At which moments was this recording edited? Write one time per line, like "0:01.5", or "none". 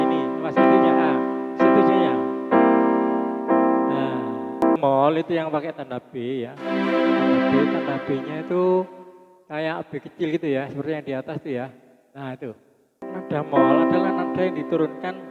0:04.8

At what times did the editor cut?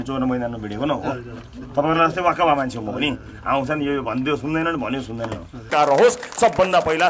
0:05.7

